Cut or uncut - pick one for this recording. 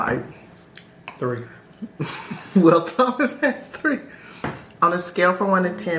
uncut